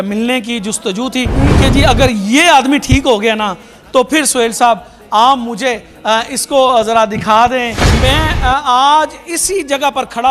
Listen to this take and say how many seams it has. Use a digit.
1